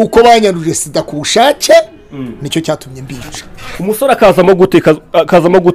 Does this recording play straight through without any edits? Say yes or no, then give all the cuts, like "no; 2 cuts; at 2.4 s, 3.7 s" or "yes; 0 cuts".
yes; 0 cuts